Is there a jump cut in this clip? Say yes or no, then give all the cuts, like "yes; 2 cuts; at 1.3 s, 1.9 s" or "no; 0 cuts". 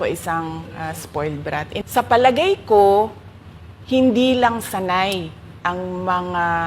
yes; 1 cut; at 1.9 s